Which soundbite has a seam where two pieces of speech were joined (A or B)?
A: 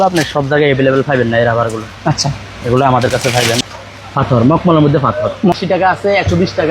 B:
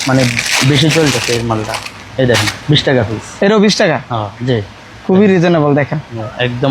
A